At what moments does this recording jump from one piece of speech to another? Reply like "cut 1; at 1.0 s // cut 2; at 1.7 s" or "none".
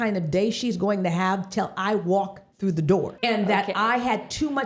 cut 1; at 3.1 s